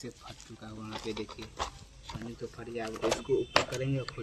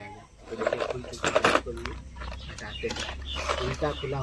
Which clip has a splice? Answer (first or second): first